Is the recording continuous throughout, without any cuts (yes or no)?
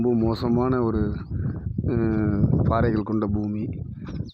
yes